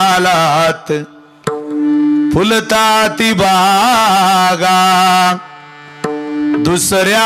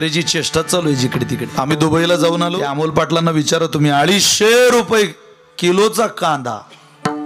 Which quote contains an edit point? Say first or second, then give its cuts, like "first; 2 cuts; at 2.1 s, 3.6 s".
second; 2 cuts; at 1.5 s, 2.7 s